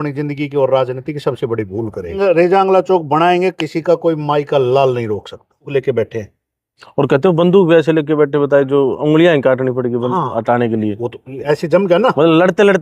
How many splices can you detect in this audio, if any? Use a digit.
2